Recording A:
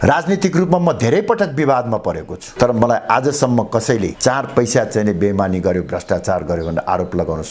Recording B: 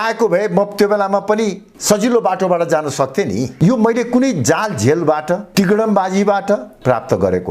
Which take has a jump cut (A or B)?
B